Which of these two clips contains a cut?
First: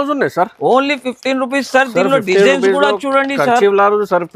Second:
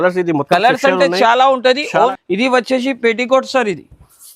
second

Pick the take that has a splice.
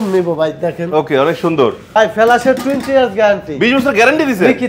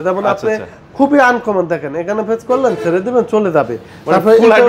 first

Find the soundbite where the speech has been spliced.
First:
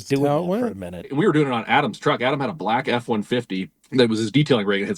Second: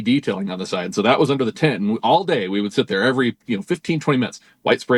first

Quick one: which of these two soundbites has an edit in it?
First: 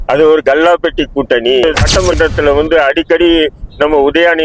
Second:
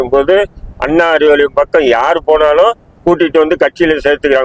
first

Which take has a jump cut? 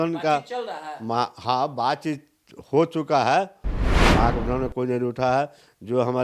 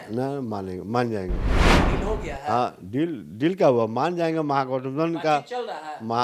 first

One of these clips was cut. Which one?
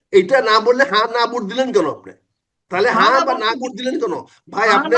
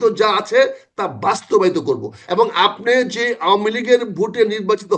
second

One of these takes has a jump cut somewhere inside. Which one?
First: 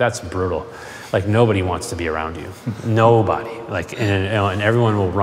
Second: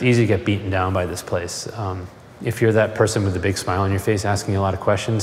second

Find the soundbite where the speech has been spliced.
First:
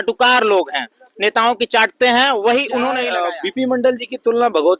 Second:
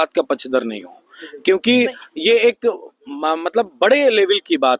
first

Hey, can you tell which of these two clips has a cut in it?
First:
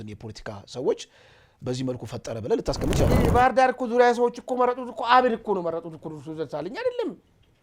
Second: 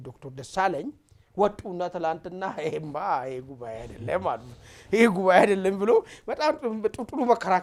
first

